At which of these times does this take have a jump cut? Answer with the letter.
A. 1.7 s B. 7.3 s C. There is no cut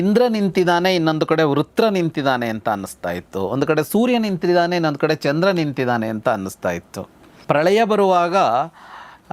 B